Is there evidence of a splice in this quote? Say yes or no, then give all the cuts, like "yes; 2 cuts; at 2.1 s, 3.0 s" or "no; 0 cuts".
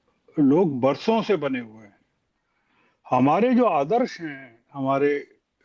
no; 0 cuts